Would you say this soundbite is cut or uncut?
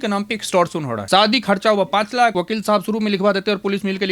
cut